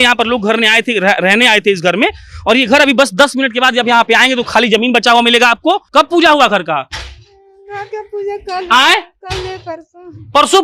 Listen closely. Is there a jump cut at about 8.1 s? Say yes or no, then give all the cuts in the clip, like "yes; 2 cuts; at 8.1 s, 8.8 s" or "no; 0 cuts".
no; 1 cut; at 5.8 s